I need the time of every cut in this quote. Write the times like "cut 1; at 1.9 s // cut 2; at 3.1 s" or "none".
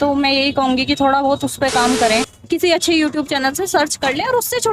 cut 1; at 2.5 s

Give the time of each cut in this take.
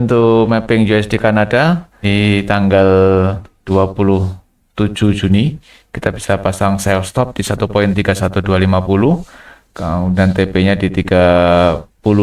cut 1; at 1.9 s // cut 2; at 3.5 s

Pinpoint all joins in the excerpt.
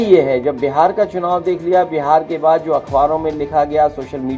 none

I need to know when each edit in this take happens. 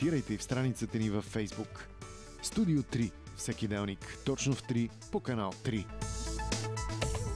cut 1; at 5.9 s

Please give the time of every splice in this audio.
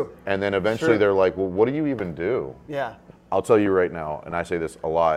cut 1; at 3.0 s

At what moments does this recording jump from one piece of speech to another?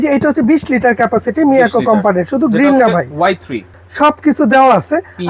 cut 1; at 3.7 s

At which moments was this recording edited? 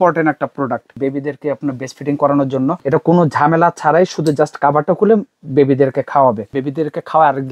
cut 1; at 0.9 s // cut 2; at 2.8 s // cut 3; at 6.5 s

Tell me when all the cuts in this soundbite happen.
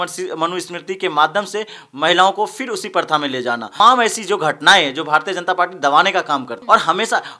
cut 1; at 3.8 s // cut 2; at 6.5 s

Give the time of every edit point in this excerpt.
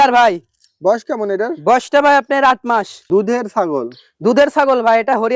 cut 1; at 3.0 s

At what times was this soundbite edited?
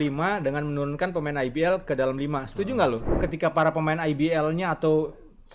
cut 1; at 3.1 s

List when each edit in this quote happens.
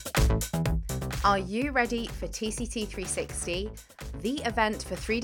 cut 1; at 1.0 s

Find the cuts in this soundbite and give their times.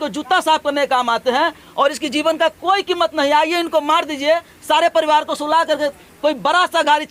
none

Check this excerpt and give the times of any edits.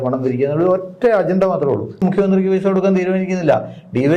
cut 1; at 1.9 s

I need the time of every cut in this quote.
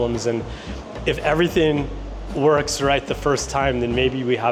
none

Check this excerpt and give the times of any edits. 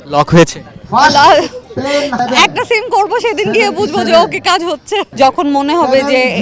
cut 1; at 2.1 s // cut 2; at 5.1 s

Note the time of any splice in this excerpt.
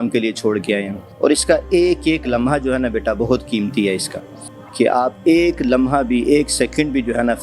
none

